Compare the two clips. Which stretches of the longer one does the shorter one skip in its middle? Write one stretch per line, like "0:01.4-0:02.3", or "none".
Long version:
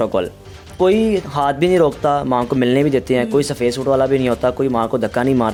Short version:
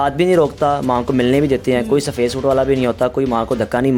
none